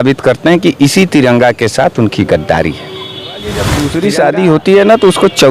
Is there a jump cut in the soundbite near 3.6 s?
yes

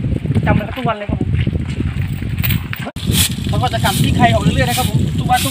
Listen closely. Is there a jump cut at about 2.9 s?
yes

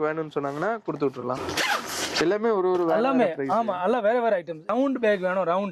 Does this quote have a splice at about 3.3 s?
no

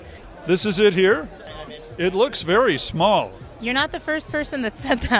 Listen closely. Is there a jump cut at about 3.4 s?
yes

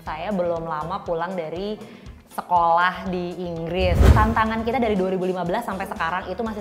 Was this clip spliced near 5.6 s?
no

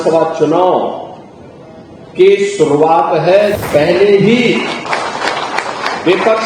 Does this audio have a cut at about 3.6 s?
yes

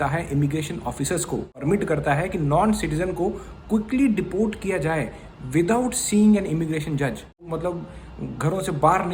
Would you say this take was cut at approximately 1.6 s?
yes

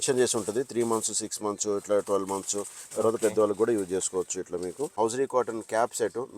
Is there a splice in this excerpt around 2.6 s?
no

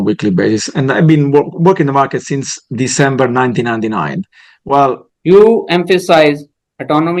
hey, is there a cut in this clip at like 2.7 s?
no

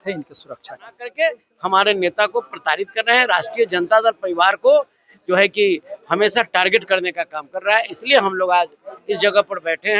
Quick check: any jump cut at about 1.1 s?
yes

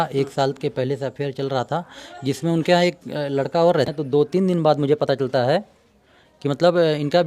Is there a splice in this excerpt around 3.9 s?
yes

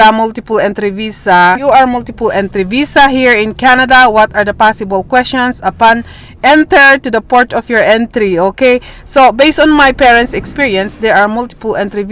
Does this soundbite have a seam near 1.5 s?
no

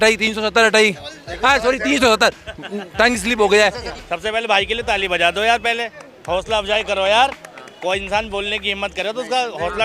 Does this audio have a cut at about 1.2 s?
no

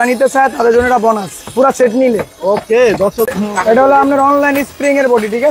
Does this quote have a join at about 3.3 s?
yes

